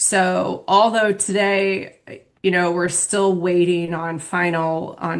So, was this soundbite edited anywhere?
no; 0 cuts

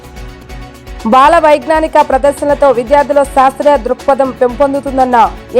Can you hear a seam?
yes; 1 cut; at 1.0 s

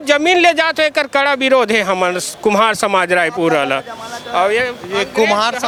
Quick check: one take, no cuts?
yes; 0 cuts

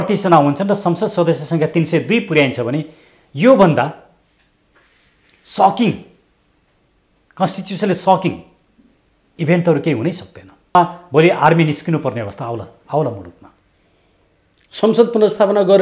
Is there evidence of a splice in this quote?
yes; 1 cut; at 10.8 s

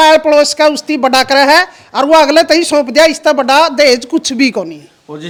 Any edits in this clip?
no; 0 cuts

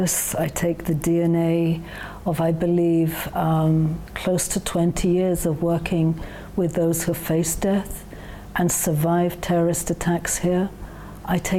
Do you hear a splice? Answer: yes; 1 cut; at 4.2 s

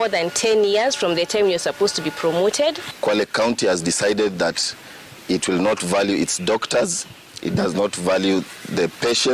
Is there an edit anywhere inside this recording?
no; 0 cuts

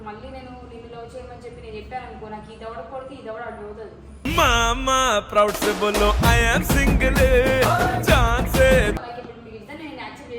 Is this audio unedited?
no; 1 cut; at 9.0 s

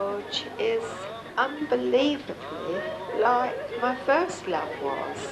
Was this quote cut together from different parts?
yes; 1 cut; at 1.2 s

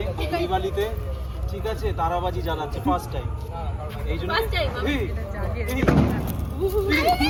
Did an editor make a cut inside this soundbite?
no; 0 cuts

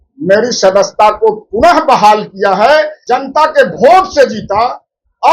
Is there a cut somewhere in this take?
yes; 1 cut; at 3.0 s

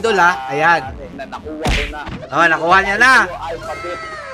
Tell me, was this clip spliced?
yes; 1 cut; at 1.1 s

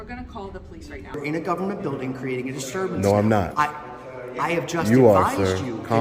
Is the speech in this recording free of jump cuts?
no; 1 cut; at 1.2 s

